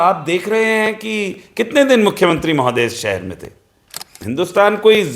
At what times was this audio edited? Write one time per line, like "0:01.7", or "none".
0:04.2